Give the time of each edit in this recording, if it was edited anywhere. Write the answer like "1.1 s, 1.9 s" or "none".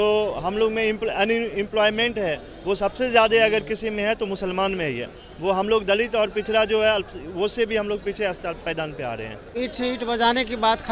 9.5 s